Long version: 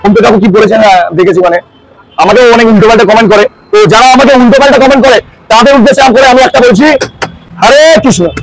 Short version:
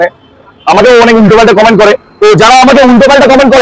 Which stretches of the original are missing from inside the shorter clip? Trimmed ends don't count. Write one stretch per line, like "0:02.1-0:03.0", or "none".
none

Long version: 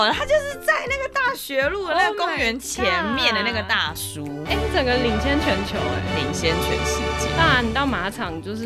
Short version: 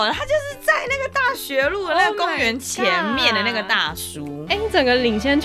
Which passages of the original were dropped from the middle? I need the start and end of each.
none

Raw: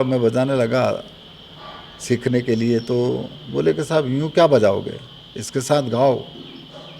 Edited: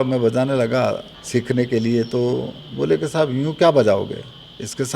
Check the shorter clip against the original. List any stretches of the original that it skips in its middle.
0:01.1-0:01.9

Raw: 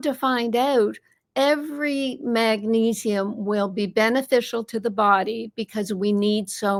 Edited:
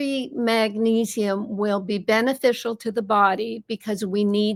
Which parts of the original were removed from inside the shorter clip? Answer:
none

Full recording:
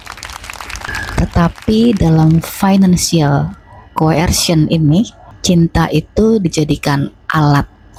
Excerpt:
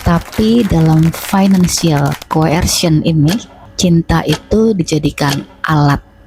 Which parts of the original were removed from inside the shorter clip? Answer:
0:03.5-0:03.8

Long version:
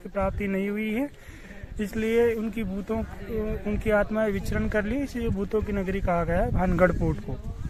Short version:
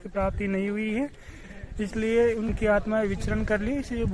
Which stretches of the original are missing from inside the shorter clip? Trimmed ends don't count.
0:02.5-0:03.8

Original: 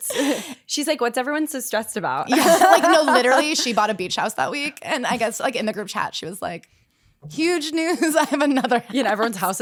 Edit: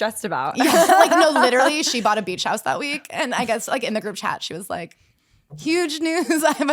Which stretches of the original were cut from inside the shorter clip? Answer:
none

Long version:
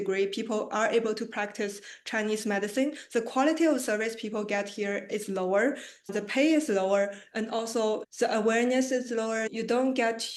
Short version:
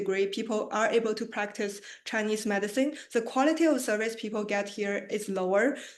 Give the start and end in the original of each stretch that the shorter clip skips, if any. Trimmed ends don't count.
none

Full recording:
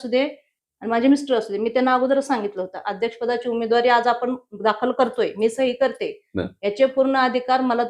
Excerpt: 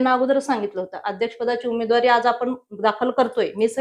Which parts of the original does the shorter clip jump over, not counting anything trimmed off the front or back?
none

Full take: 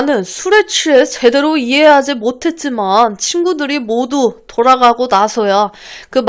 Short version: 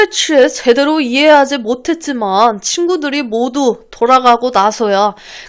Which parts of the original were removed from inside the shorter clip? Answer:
none

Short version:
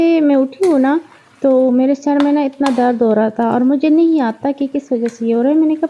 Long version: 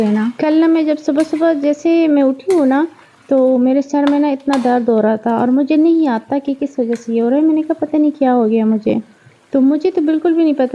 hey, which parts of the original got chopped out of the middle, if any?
none

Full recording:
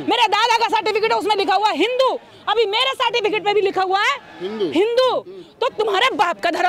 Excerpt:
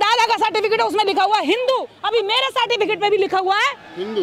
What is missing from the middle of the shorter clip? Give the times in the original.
0:02.3-0:02.4

